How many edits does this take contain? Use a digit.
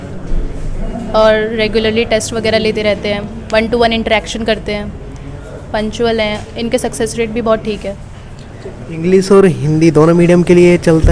0